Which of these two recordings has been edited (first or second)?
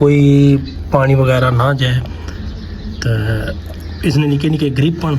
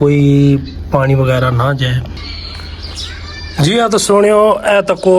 second